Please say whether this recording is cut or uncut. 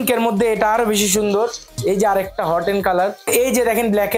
cut